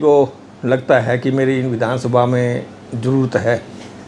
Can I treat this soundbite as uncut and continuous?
yes; 0 cuts

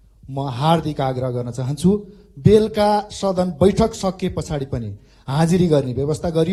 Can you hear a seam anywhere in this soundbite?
no; 0 cuts

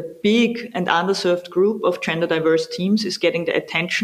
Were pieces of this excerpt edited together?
no; 0 cuts

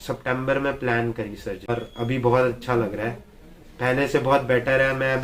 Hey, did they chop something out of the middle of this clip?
yes; 1 cut; at 1.7 s

